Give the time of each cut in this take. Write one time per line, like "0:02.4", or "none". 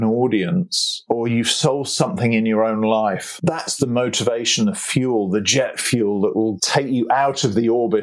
0:01.0
0:03.3
0:06.6

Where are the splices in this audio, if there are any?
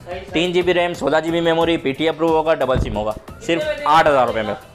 none

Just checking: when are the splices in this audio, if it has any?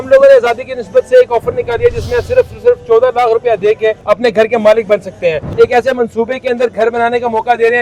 0:04.0
0:05.4

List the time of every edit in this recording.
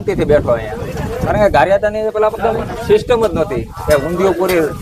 0:01.2

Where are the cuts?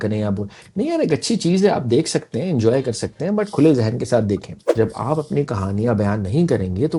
0:04.6

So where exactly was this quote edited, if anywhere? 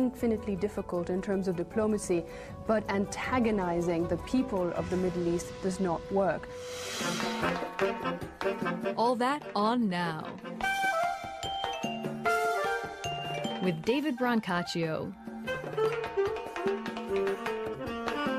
0:14.8

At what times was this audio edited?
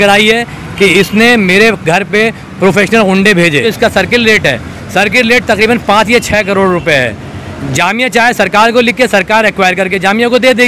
0:03.7

